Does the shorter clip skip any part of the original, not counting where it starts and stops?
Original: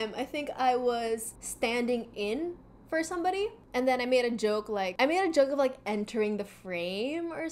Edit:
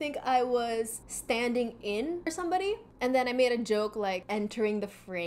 yes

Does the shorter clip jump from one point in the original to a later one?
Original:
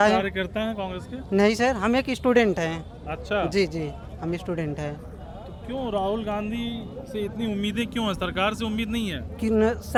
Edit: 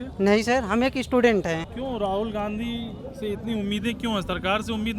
yes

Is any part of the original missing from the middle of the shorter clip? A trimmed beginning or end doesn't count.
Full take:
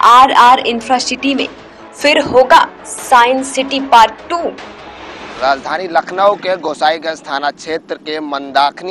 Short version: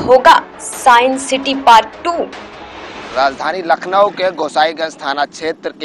no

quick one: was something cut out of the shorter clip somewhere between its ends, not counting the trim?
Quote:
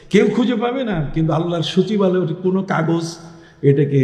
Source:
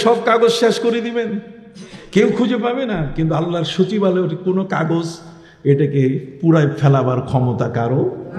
no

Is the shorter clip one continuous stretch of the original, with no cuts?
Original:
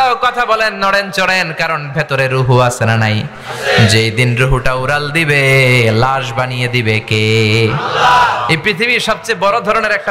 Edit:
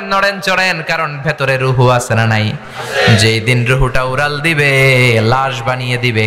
yes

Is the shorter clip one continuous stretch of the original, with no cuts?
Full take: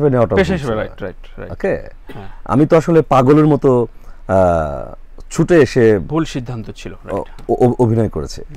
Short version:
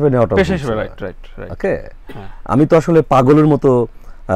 yes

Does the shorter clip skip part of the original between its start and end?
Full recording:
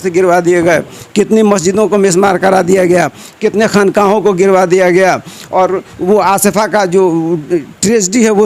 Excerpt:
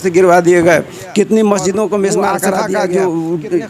yes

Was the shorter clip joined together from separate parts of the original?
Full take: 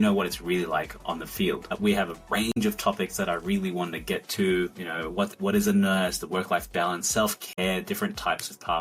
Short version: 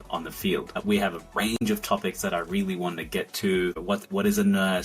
yes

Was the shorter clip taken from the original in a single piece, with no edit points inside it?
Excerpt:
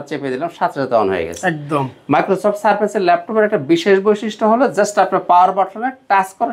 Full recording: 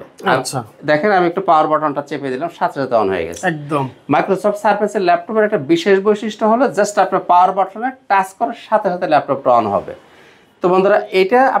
yes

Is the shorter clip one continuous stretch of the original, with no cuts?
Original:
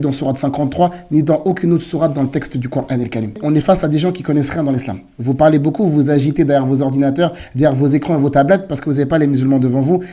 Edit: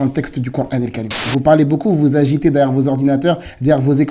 no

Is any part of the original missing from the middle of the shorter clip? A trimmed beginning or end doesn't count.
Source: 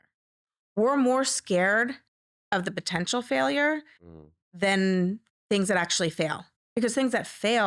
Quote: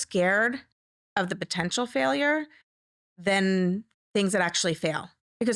no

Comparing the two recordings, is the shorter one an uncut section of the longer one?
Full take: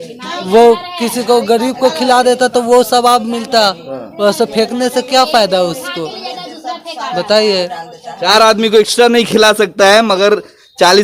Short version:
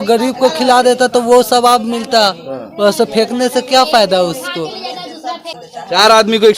no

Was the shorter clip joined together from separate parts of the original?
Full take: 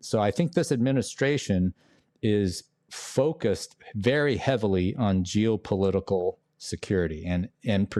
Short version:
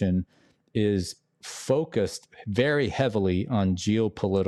no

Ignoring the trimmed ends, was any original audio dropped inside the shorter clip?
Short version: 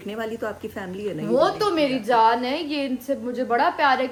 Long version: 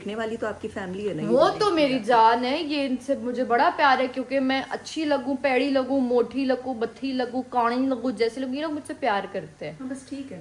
no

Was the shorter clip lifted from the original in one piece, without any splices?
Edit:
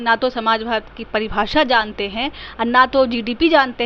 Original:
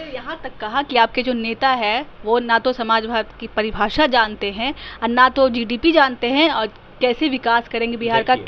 yes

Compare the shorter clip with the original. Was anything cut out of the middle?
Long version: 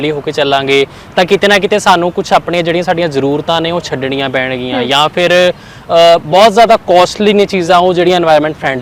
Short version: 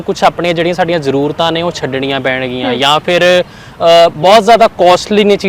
no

